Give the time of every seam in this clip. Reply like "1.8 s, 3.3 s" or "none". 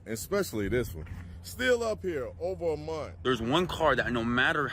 3.2 s